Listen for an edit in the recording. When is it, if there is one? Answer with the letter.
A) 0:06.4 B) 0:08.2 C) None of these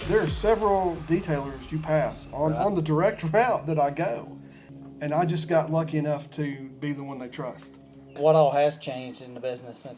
B